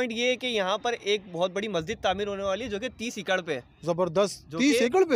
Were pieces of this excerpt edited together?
no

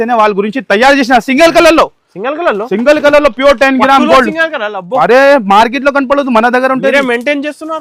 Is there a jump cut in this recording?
no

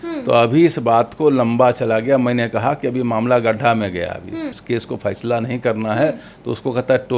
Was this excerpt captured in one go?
no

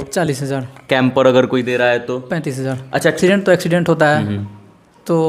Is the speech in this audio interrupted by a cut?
yes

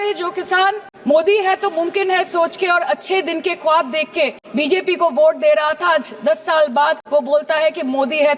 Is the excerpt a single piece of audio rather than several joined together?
no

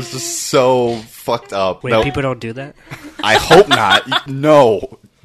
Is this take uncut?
no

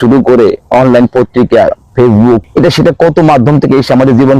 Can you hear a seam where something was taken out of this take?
yes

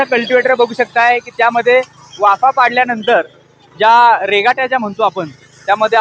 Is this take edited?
no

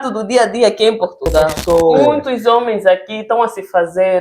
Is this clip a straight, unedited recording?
no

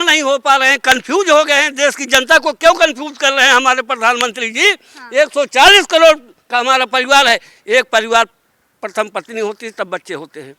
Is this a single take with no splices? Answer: yes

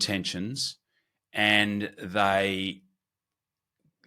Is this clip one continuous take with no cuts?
yes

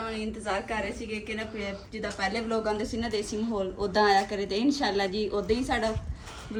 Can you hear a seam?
no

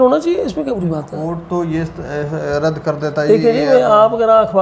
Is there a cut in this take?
no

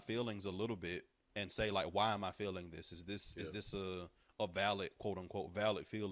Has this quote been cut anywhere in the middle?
no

